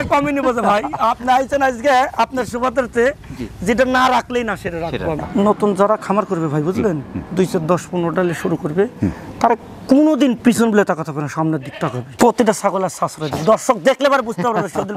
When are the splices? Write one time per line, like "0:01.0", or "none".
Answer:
0:05.2
0:12.0